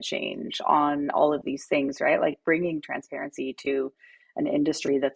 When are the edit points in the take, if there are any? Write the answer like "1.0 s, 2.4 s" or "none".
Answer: none